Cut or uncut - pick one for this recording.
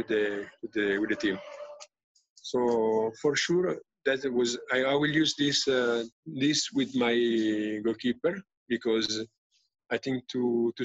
cut